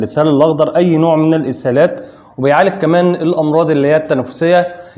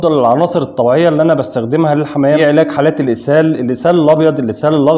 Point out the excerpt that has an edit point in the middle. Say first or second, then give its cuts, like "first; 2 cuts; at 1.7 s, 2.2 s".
second; 1 cut; at 2.4 s